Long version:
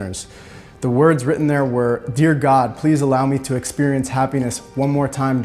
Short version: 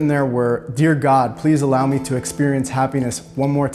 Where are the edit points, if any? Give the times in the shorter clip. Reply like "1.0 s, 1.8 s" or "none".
none